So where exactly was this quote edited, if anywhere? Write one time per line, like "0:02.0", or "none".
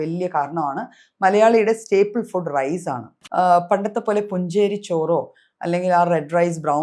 0:03.1